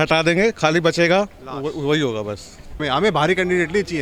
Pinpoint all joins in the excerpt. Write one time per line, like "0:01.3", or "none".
0:02.8